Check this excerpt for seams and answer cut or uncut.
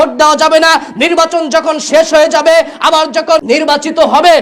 cut